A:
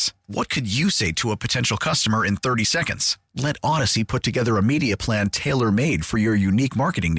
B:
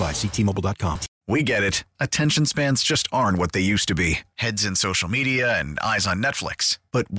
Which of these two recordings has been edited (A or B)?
B